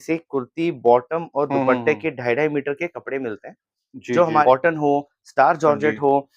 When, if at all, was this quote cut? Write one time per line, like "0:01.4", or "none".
0:04.4